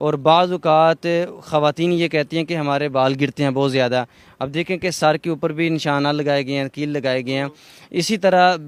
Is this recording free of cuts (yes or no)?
yes